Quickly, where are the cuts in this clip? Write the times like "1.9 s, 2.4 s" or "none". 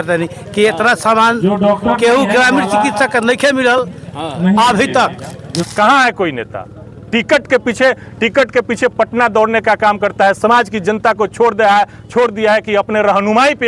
5.6 s